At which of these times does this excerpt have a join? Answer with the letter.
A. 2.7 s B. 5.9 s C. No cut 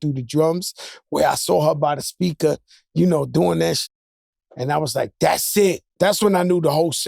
B